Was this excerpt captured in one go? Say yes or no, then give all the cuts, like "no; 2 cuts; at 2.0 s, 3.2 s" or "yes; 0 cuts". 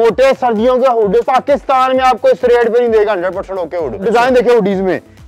no; 2 cuts; at 1.3 s, 4.0 s